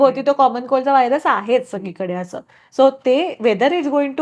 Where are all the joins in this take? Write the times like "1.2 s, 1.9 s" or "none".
none